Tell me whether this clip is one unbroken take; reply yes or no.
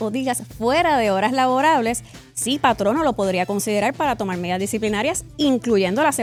yes